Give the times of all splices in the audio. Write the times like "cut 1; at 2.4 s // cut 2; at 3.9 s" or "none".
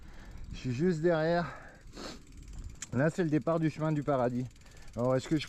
none

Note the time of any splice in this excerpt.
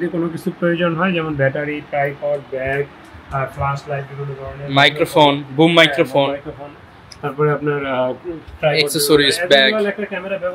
none

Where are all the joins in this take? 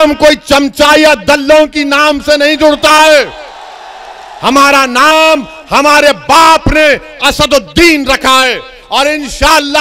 none

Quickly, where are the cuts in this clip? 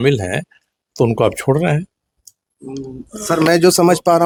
none

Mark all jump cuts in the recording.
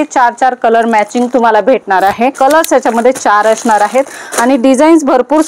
cut 1; at 2.4 s

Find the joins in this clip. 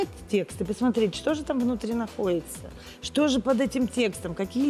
none

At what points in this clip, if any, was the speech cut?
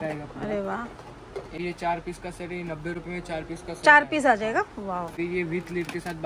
cut 1; at 1.5 s

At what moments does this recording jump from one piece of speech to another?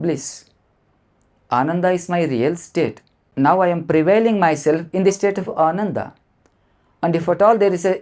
cut 1; at 3.3 s

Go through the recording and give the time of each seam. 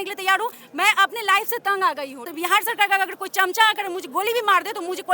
cut 1; at 2.2 s

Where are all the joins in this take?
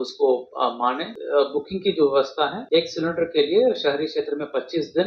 cut 1; at 1.1 s // cut 2; at 2.6 s

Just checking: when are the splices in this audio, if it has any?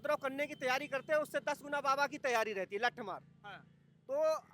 none

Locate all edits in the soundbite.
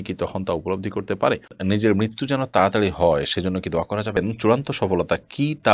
cut 1; at 1.6 s // cut 2; at 4.2 s

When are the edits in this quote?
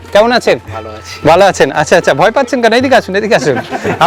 none

